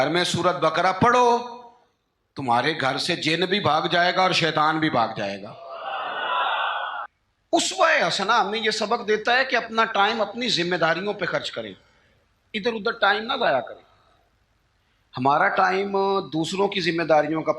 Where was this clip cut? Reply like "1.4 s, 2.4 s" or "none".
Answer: 7.0 s